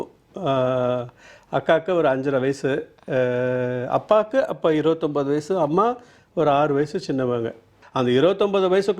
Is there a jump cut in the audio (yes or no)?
yes